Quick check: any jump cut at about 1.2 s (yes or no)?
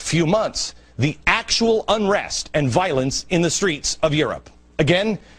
yes